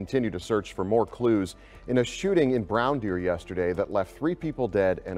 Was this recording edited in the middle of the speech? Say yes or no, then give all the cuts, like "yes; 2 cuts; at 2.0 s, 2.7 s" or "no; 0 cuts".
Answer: no; 0 cuts